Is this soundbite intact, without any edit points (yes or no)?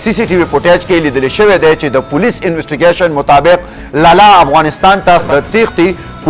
no